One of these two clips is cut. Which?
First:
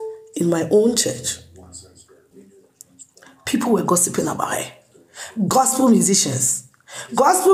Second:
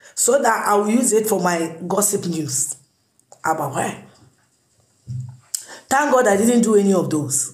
first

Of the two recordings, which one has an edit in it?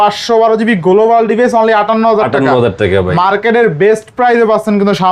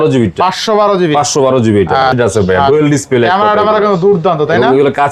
second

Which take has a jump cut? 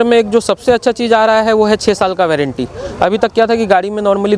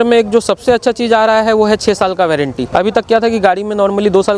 second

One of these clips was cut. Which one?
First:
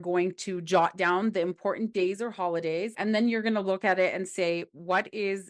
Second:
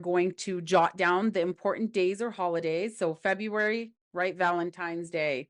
first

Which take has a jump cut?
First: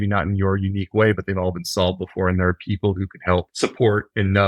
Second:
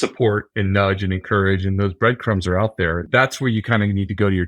second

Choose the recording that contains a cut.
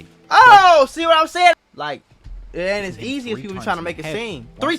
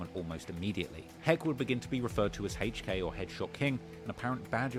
first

